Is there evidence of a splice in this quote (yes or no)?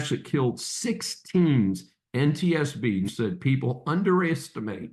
yes